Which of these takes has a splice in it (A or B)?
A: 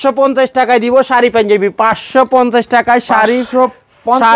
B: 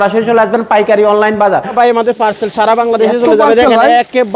B